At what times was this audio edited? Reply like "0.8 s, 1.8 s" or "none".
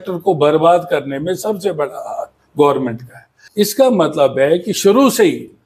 3.6 s